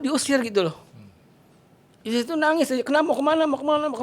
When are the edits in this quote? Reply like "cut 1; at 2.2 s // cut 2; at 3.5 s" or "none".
none